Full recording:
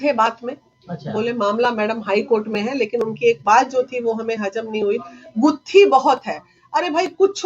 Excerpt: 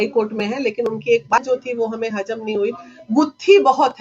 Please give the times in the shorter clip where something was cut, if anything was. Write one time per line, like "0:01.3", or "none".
0:01.3